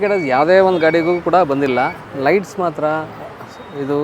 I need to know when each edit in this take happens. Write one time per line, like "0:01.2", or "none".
0:02.0